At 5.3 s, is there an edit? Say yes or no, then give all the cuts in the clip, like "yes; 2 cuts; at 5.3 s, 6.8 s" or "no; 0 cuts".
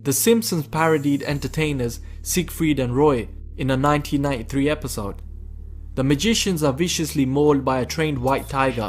no; 1 cut; at 4.0 s